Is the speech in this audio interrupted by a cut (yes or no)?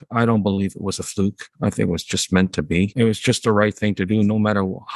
yes